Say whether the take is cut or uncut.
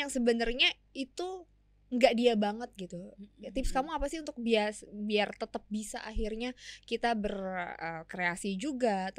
uncut